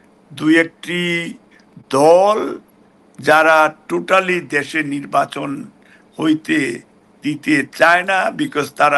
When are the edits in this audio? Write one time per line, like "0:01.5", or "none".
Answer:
none